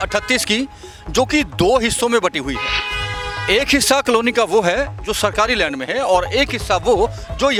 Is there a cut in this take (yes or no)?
no